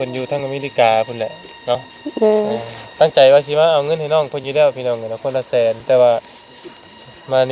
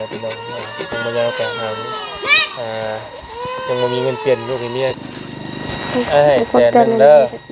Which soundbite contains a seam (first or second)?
second